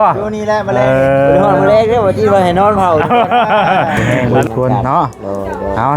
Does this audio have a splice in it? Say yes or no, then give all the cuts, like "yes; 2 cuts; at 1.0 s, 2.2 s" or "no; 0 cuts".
yes; 1 cut; at 4.1 s